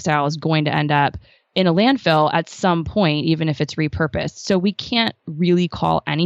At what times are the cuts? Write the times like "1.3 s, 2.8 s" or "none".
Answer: none